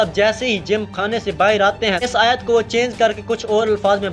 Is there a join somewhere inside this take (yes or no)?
yes